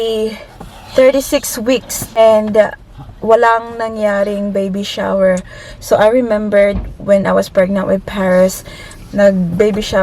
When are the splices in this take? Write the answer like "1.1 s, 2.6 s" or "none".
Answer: 2.2 s